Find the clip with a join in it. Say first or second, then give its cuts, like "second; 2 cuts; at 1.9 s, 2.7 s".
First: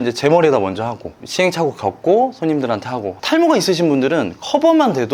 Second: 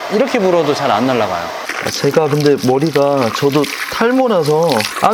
second; 1 cut; at 1.7 s